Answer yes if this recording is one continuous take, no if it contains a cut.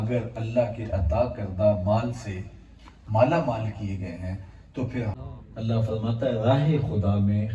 no